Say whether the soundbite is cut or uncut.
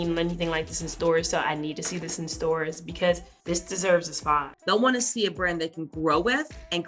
cut